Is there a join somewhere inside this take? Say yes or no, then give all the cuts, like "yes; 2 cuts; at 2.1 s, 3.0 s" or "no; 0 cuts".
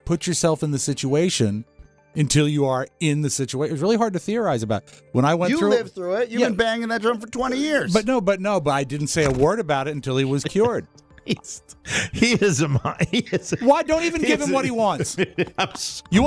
no; 0 cuts